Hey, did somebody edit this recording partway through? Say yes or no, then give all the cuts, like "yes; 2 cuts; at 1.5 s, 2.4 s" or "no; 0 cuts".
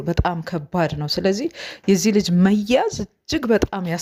no; 0 cuts